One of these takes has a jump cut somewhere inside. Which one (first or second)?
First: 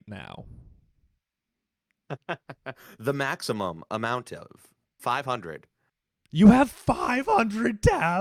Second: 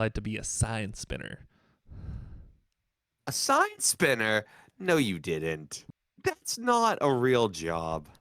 second